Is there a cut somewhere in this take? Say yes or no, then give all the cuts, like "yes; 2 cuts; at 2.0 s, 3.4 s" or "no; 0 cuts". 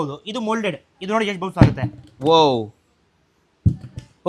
no; 0 cuts